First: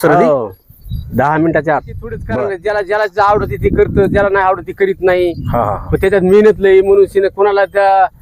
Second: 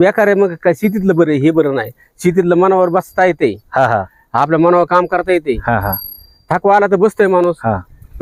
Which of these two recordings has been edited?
first; 1 cut; at 2.3 s

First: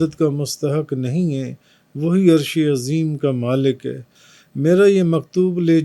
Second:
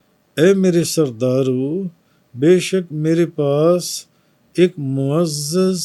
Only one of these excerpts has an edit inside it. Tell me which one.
first; 1 cut; at 4.1 s

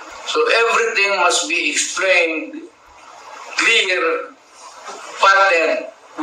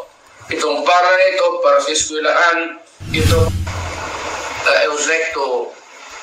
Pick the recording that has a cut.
second; 1 cut; at 3.5 s

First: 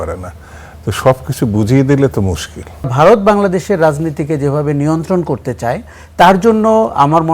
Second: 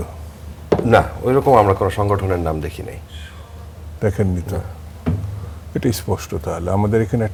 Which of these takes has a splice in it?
first; 1 cut; at 2.9 s

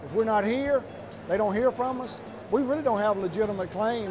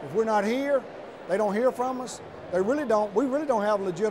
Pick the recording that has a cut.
first; 1 cut; at 2.5 s

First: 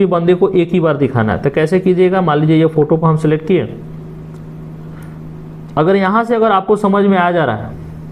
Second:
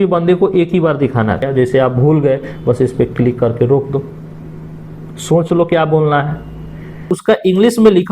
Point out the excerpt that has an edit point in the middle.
second; 2 cuts; at 1.5 s, 7.1 s

